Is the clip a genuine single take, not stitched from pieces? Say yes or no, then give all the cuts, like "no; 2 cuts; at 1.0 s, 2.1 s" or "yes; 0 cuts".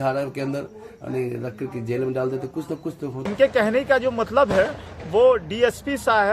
no; 1 cut; at 3.2 s